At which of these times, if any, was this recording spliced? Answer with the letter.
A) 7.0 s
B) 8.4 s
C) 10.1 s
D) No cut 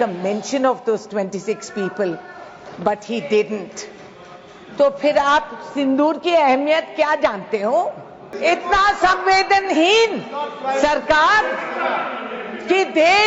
B